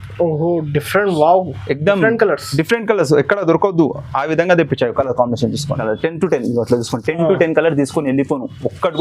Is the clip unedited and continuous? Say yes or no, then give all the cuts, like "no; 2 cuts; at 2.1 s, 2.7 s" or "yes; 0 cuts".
no; 1 cut; at 5.8 s